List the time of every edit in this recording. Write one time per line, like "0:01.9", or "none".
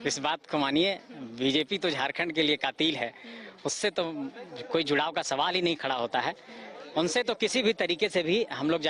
none